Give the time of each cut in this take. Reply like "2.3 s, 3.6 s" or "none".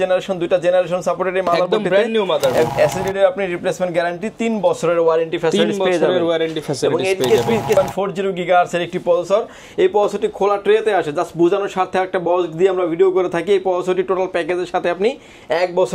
2.7 s, 7.8 s

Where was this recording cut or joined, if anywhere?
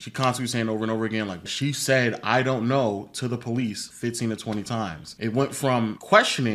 1.5 s

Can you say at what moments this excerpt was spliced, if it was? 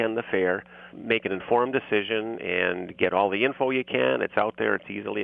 1.0 s

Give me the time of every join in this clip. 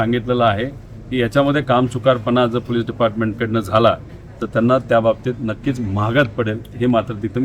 none

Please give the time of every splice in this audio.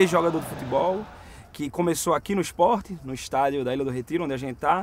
none

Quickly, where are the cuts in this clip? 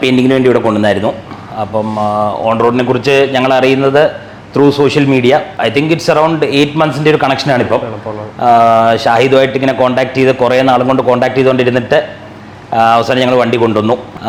none

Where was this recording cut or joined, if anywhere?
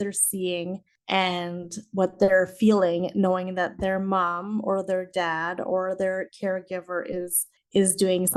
none

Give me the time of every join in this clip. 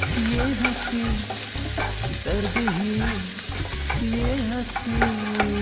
none

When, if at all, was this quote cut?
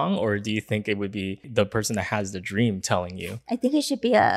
1.5 s

